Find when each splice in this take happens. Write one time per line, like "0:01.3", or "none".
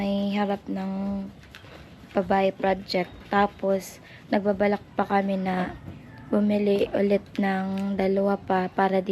none